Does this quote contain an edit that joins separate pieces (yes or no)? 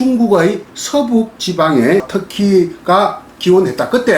yes